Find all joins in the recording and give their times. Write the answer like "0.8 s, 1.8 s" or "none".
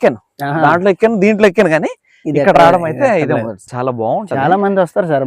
3.7 s